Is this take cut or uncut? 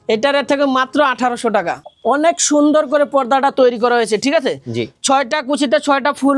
cut